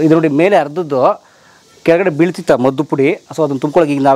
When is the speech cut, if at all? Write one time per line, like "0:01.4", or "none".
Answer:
none